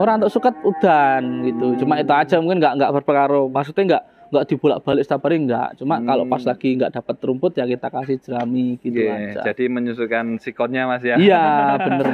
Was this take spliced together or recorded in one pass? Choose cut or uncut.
uncut